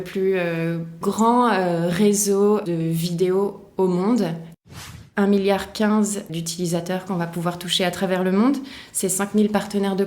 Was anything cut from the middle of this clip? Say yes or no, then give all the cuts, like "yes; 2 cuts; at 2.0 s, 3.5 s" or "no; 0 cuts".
yes; 4 cuts; at 1.0 s, 2.6 s, 4.7 s, 6.3 s